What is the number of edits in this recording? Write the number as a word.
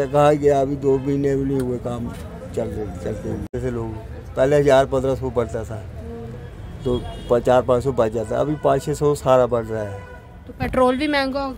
one